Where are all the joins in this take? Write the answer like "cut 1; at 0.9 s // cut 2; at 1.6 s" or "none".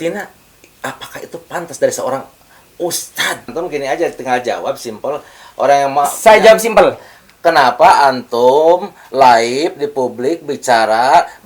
cut 1; at 3.5 s

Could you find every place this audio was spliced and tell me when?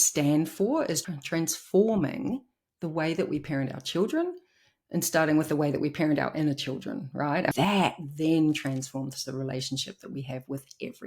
cut 1; at 1.0 s // cut 2; at 7.5 s

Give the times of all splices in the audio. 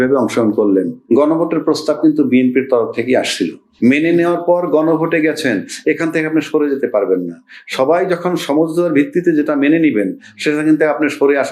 cut 1; at 1.0 s // cut 2; at 3.6 s

